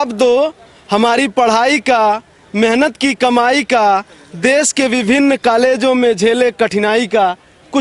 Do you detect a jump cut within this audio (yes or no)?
no